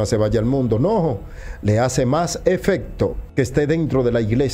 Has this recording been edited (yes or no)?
yes